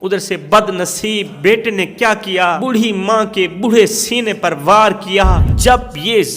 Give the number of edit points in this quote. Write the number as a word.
three